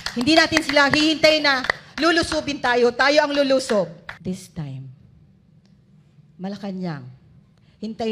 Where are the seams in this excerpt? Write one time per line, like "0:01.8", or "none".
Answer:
0:04.1